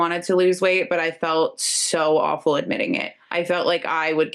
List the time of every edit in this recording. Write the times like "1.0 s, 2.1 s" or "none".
3.2 s

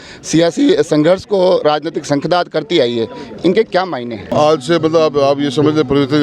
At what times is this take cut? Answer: 4.3 s

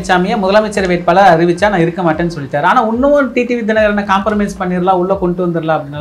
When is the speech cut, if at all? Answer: none

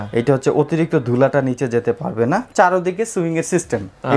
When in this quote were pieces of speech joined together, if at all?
2.5 s

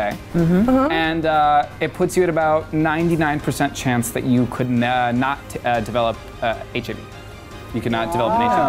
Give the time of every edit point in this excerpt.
none

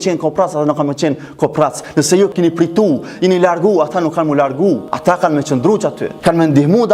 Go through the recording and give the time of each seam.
2.3 s, 4.9 s, 6.1 s

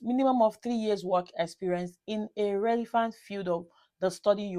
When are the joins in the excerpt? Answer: none

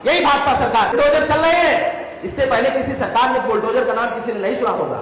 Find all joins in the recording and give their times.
0.9 s

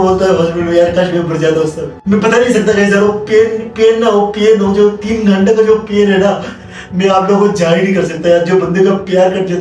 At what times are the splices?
1.9 s

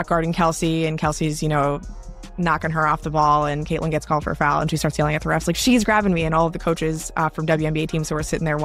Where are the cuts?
none

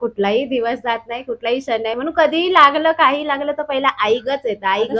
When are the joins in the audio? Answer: none

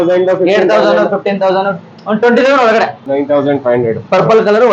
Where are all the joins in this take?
3.0 s

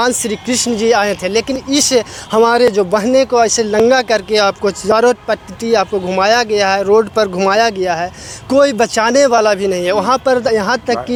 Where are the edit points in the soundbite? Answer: none

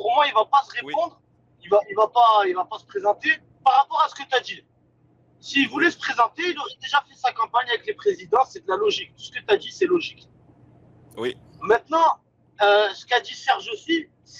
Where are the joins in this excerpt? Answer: none

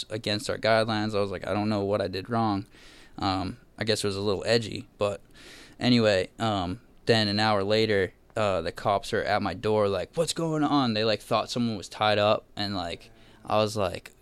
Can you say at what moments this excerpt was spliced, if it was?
none

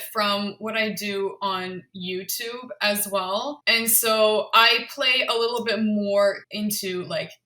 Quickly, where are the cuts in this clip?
3.6 s, 6.5 s

